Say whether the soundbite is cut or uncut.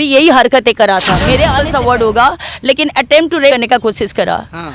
cut